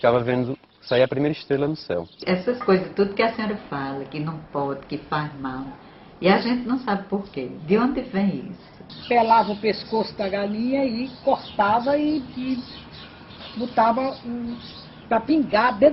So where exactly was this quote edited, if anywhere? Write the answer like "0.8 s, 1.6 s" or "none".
2.2 s, 8.8 s

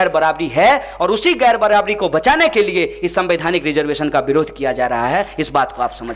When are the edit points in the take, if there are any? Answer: none

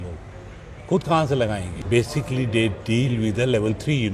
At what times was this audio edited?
1.7 s

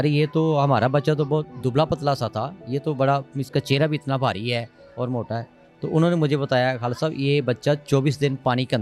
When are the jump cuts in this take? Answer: none

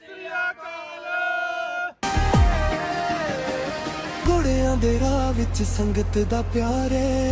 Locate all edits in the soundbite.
2.0 s

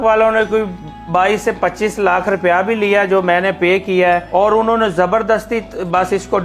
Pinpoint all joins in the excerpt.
4.2 s

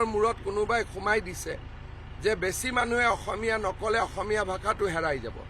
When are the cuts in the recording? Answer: none

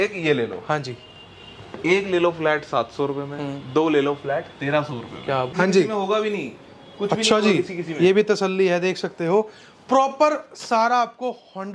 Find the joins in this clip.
5.5 s

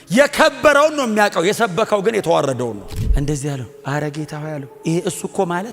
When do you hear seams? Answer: 2.9 s

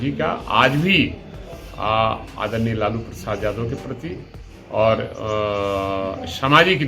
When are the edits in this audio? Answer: none

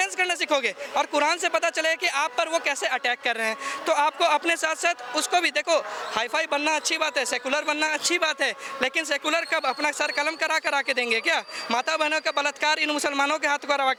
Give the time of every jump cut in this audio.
none

